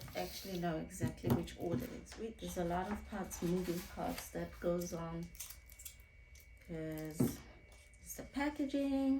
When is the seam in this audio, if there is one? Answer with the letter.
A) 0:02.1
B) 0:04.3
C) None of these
A